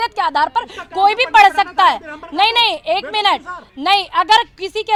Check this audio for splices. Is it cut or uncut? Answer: uncut